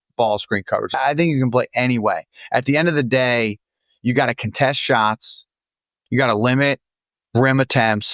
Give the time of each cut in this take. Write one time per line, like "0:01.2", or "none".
0:00.9
0:05.9